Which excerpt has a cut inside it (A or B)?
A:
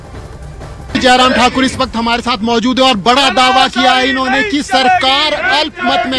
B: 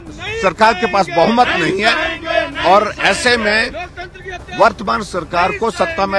A